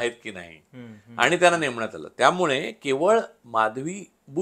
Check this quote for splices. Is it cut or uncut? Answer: uncut